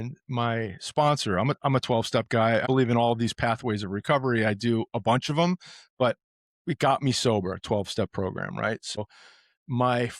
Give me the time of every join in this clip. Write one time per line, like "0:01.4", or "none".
0:02.6
0:09.0